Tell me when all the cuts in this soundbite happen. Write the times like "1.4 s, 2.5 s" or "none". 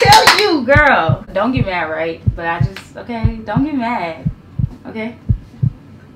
1.2 s